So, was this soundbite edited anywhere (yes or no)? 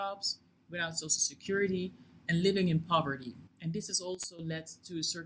no